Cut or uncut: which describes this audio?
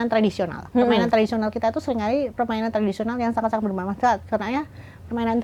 uncut